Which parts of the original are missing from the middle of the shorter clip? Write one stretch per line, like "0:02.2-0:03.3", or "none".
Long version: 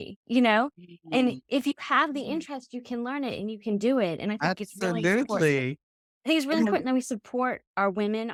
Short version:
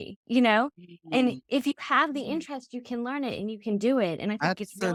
none